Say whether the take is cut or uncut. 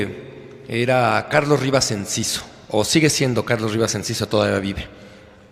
cut